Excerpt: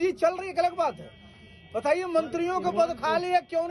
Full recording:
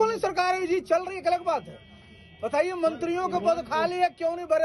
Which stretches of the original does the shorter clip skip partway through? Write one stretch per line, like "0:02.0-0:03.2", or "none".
none